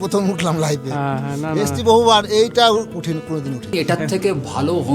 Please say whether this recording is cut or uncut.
cut